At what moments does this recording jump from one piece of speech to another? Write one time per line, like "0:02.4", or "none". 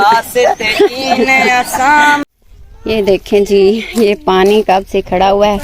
0:02.2